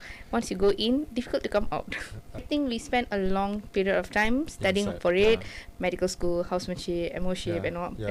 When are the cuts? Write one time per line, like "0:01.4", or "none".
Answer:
0:02.4